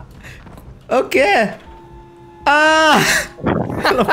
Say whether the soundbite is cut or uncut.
uncut